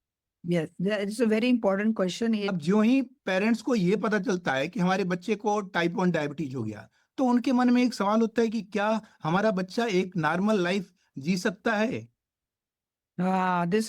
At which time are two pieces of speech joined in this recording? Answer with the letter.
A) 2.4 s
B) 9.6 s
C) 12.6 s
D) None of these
A